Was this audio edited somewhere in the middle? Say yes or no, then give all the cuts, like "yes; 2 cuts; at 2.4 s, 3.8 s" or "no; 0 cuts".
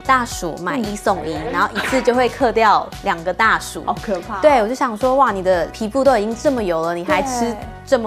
no; 0 cuts